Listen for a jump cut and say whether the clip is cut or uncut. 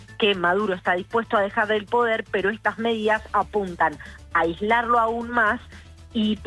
uncut